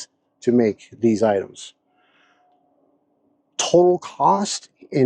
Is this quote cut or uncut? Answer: uncut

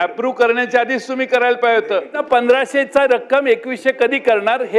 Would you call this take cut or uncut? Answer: cut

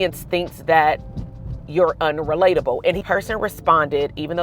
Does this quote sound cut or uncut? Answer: cut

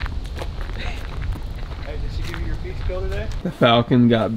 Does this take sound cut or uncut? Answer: cut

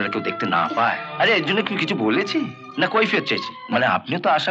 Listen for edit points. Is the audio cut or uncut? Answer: cut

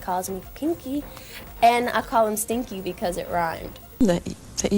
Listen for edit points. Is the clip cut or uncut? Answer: cut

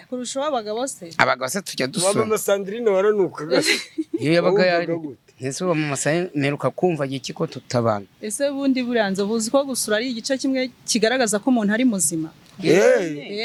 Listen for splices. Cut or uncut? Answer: uncut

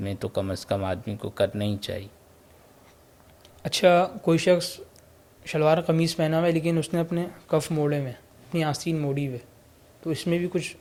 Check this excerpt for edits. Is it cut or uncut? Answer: uncut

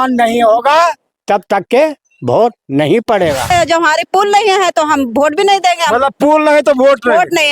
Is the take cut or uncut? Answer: cut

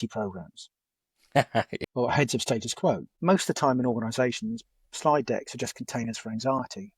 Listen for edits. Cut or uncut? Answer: cut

